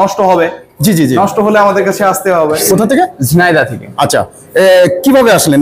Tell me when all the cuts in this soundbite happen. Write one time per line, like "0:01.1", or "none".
0:02.6